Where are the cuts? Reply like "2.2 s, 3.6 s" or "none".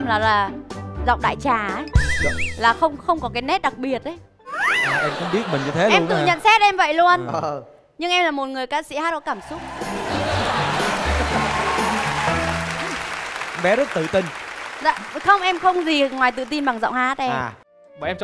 none